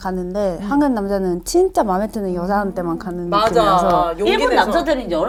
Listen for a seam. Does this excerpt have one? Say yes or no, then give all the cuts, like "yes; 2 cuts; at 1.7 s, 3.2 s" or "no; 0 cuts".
no; 0 cuts